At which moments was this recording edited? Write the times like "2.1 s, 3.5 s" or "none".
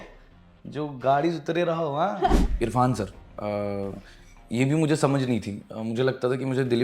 2.4 s